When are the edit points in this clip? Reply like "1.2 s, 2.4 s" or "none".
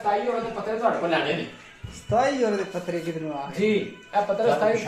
none